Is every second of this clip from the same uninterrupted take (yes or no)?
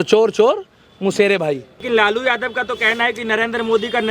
no